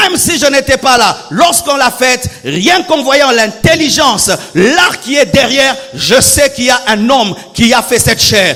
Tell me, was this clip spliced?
no; 0 cuts

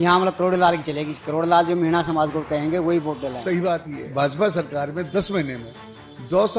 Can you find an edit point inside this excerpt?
yes; 1 cut; at 3.6 s

